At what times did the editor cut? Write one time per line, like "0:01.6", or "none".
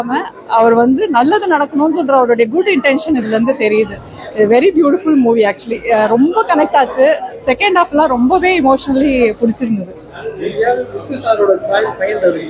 none